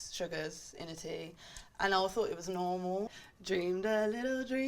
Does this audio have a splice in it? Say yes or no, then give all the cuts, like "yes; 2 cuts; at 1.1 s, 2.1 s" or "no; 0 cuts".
yes; 1 cut; at 3.2 s